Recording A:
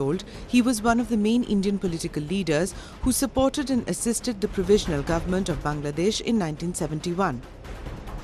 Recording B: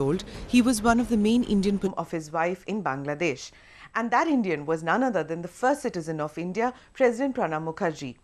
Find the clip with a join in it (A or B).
A